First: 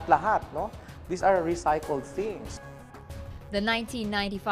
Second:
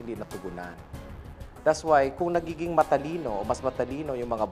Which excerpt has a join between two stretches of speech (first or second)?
second